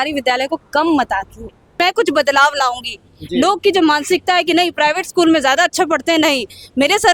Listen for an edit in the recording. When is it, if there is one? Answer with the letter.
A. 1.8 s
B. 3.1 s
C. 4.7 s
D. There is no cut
A